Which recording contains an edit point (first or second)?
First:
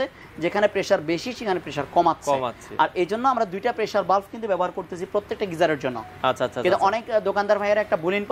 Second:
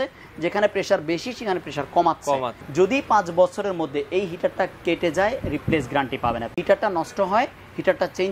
second